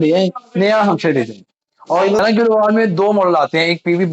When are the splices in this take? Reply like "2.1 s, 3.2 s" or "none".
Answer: 2.2 s